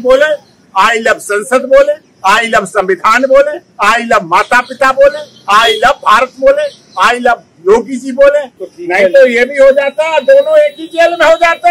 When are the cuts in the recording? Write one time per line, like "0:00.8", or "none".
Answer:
0:08.6

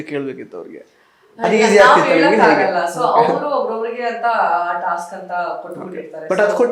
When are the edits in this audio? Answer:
none

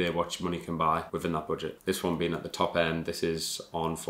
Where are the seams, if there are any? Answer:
none

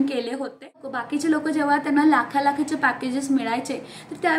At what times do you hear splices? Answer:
0:01.0

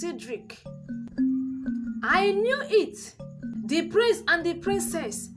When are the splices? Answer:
0:01.1
0:03.4

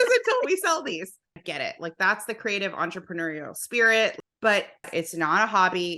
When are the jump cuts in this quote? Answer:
0:01.4
0:04.3
0:04.9

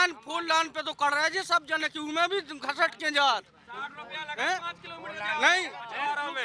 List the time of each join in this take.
none

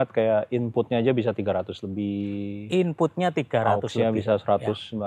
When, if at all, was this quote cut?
none

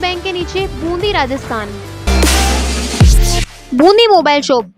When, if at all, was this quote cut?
0:02.1

